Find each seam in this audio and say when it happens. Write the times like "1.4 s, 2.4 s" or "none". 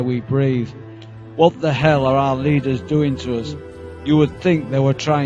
4.0 s